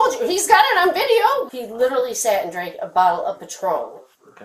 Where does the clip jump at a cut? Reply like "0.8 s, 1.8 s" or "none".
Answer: 1.5 s